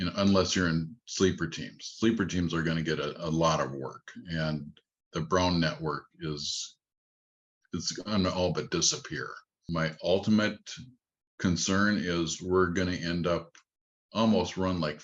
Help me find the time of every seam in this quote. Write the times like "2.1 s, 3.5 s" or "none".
9.6 s